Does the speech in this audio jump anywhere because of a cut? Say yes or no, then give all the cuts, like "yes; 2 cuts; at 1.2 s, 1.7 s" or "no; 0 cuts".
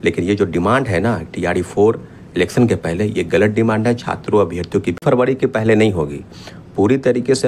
yes; 1 cut; at 5.0 s